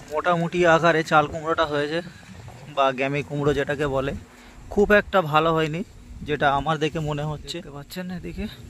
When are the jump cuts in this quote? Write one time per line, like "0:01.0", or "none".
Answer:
0:07.8